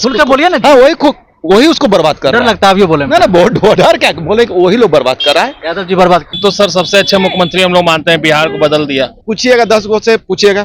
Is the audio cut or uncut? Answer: cut